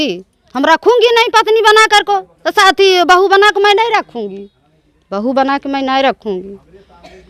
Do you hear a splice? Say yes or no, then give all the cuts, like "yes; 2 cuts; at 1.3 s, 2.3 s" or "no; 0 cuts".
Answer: no; 0 cuts